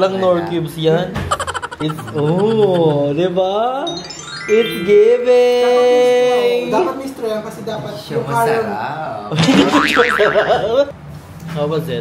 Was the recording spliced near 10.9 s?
yes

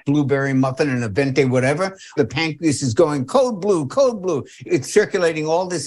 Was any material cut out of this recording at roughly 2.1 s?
yes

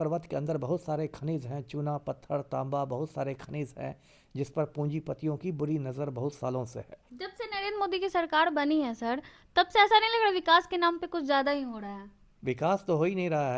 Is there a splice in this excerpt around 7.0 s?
yes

